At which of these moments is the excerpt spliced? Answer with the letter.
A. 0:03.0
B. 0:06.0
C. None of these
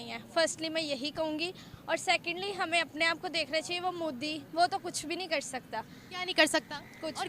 C